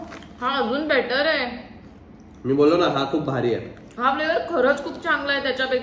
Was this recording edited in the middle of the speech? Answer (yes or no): no